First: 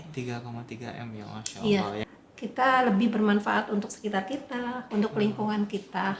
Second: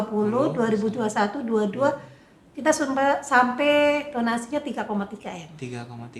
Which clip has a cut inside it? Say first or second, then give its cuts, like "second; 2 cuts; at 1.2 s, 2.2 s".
first; 1 cut; at 2.0 s